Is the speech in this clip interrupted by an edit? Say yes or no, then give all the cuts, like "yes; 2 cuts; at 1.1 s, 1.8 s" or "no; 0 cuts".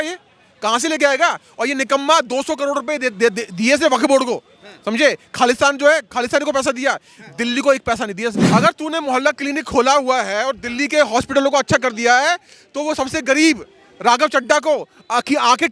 yes; 1 cut; at 8.4 s